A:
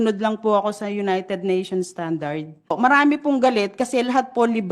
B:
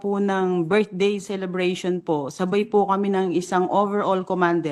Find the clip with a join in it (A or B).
A